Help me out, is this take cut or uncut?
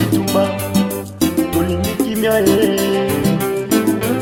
uncut